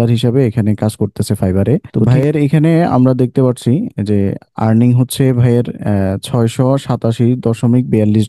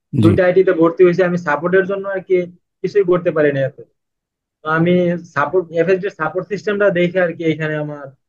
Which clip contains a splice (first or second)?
first